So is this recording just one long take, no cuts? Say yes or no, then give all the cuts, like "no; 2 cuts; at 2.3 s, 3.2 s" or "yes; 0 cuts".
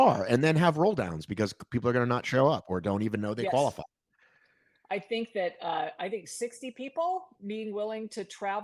yes; 0 cuts